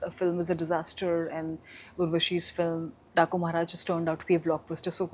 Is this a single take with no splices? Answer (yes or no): yes